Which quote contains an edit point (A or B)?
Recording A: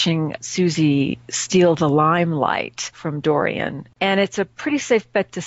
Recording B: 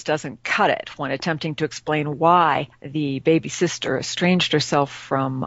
A